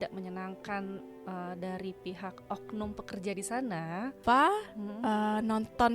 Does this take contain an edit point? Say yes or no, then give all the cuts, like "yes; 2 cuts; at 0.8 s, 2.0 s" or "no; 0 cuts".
yes; 1 cut; at 4.1 s